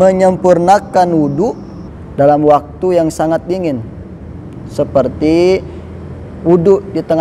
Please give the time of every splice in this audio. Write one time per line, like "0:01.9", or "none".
0:01.8